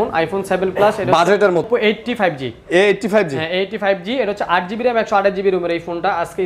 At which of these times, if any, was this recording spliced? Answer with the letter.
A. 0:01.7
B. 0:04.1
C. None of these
A